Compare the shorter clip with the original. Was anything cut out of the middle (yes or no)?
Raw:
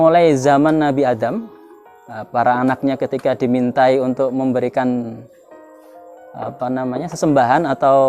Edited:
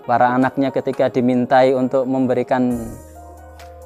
no